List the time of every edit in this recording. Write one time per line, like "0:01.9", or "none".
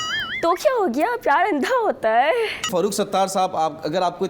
0:02.7